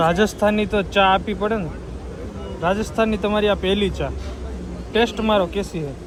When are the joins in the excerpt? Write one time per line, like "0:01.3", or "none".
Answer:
none